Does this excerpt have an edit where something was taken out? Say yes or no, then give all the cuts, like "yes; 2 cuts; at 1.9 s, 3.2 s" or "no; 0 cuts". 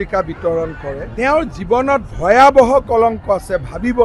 yes; 1 cut; at 1.1 s